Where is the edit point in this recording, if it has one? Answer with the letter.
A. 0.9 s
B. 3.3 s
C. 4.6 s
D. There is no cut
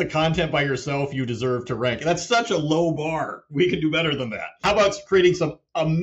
C